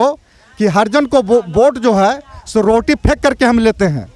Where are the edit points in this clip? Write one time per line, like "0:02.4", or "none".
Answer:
none